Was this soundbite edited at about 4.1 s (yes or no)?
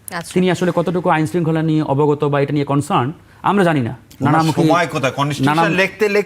yes